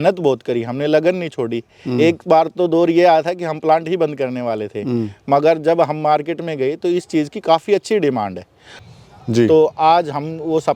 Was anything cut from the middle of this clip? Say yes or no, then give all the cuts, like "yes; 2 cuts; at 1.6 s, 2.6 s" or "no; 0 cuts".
yes; 1 cut; at 8.8 s